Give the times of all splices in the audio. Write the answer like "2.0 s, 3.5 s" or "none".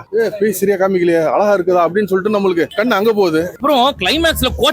3.6 s